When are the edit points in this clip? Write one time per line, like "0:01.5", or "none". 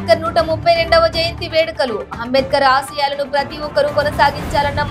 none